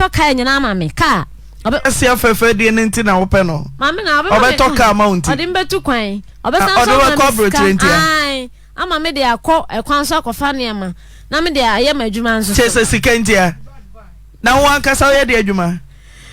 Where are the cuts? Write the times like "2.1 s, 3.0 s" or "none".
none